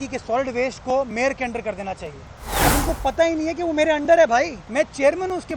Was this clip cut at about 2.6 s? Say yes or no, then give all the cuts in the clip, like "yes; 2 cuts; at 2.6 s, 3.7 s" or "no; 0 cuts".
yes; 2 cuts; at 2.6 s, 4.6 s